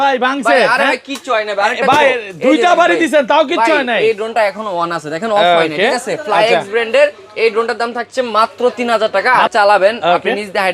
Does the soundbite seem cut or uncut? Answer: cut